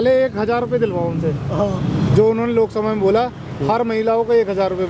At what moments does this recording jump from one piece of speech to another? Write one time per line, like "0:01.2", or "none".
none